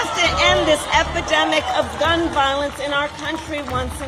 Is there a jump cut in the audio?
no; 0 cuts

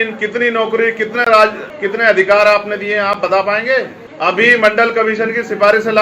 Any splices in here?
yes; 2 cuts; at 1.7 s, 4.0 s

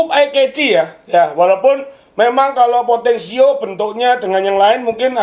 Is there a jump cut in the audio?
no; 0 cuts

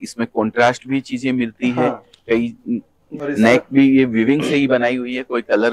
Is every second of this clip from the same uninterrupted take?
no; 1 cut; at 3.1 s

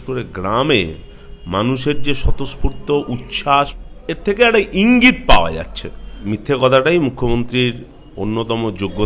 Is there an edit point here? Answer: yes; 2 cuts; at 3.8 s, 6.3 s

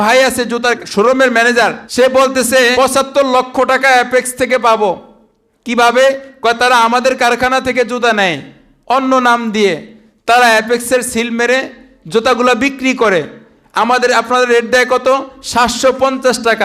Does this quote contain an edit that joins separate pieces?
yes; 3 cuts; at 0.8 s, 1.8 s, 2.7 s

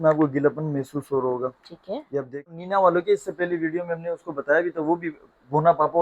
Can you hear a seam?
yes; 1 cut; at 2.6 s

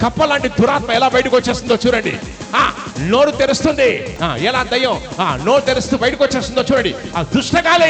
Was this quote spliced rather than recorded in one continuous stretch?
yes; 1 cut; at 4.1 s

